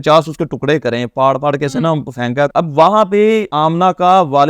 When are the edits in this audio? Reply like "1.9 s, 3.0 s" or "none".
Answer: 2.5 s, 3.5 s